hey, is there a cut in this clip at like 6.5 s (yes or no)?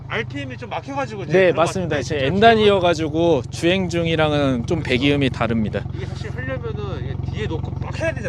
no